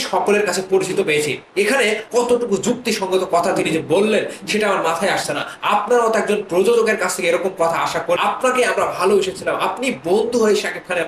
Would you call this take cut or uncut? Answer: uncut